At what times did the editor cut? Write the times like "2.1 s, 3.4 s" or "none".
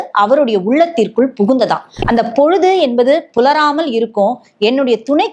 1.9 s